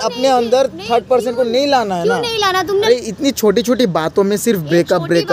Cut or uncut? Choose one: cut